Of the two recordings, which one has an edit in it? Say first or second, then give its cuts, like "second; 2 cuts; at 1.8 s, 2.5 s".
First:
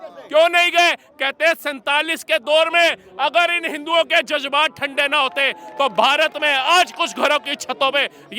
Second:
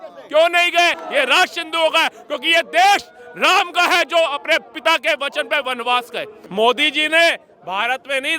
second; 2 cuts; at 1.0 s, 6.4 s